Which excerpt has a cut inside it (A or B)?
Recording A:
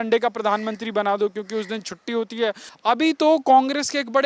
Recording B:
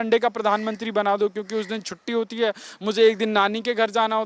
A